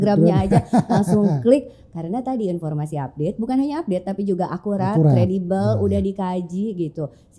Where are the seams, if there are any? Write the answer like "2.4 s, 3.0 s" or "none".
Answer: none

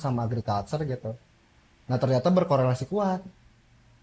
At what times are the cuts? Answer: none

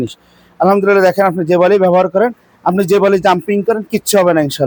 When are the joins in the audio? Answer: none

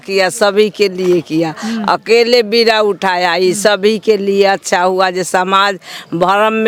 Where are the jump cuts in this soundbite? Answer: none

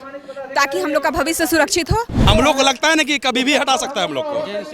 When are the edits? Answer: 2.2 s

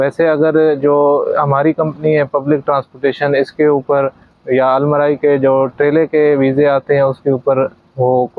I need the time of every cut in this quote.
none

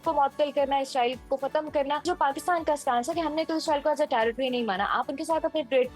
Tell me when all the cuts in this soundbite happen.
2.0 s

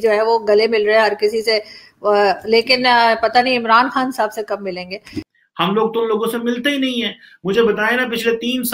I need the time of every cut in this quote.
5.2 s

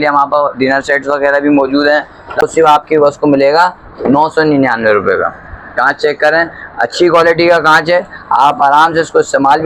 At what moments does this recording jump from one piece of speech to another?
2.4 s

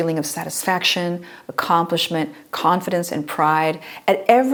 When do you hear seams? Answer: none

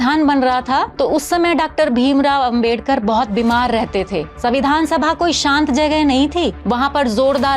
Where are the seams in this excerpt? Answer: 0.9 s, 4.3 s, 6.6 s

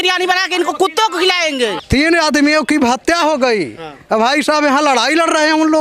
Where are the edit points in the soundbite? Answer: 1.8 s

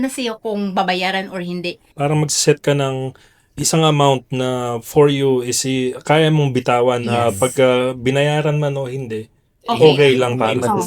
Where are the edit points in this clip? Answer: 1.9 s

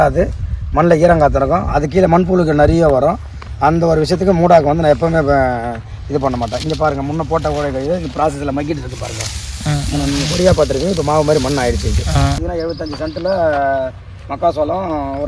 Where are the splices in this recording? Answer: 12.4 s

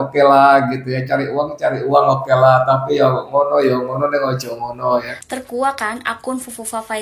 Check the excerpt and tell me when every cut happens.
5.1 s

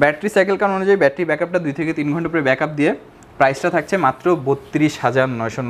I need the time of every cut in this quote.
none

